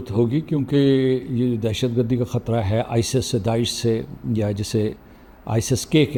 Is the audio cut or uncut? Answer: uncut